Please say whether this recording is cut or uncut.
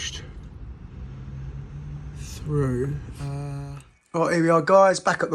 cut